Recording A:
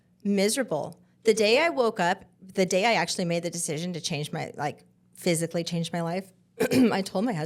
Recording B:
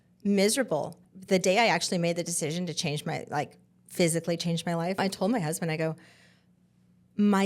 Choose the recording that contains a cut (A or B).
B